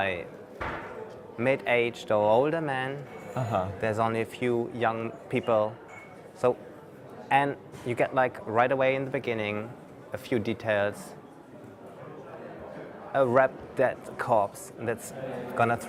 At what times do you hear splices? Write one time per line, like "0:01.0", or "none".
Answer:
none